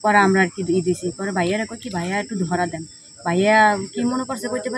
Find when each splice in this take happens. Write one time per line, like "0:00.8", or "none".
none